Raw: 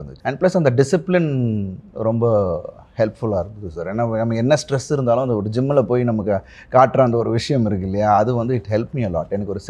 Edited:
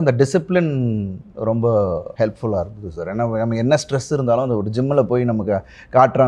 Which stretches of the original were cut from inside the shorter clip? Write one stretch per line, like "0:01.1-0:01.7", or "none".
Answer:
0:02.7-0:02.9